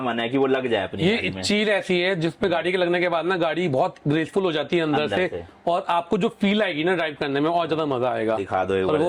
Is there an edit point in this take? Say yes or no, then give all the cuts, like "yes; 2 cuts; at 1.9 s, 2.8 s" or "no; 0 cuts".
no; 0 cuts